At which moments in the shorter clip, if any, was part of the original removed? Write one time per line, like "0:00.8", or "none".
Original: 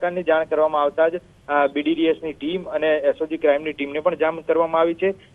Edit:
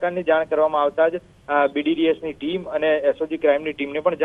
none